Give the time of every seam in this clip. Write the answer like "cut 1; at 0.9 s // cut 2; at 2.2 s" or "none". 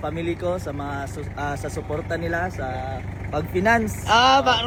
none